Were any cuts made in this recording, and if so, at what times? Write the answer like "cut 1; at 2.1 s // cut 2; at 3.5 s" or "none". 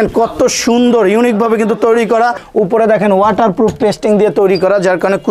cut 1; at 2.4 s